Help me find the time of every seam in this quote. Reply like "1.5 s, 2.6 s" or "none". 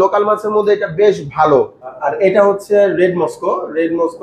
2.0 s